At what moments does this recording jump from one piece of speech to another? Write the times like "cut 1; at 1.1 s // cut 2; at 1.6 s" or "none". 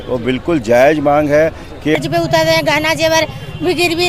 cut 1; at 2.0 s